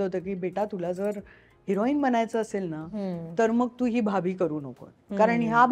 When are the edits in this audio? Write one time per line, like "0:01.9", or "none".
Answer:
none